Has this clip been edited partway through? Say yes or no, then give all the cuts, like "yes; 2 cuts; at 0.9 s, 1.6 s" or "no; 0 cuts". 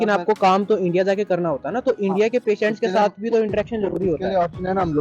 no; 0 cuts